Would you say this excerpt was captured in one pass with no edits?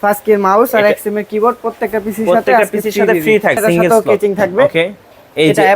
no; 1 cut; at 3.6 s

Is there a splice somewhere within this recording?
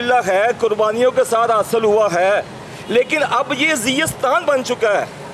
no; 0 cuts

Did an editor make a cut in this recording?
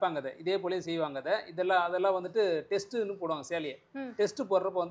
no; 0 cuts

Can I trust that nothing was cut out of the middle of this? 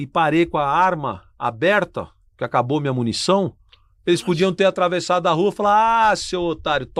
yes; 0 cuts

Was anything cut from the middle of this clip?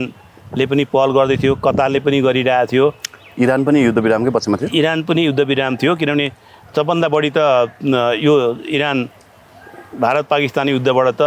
no; 0 cuts

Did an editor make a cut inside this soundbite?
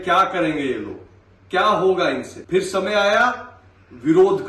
yes; 1 cut; at 2.3 s

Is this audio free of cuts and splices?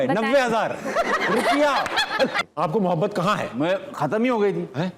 no; 1 cut; at 2.3 s

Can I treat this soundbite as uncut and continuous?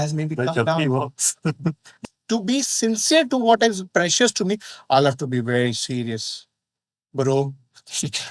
no; 1 cut; at 1.9 s

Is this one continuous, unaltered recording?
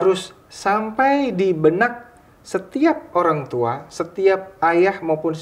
yes; 0 cuts

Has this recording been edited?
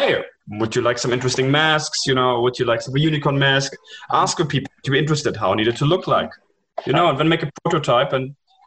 no; 0 cuts

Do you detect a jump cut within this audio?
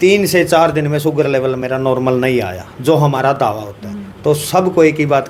no; 0 cuts

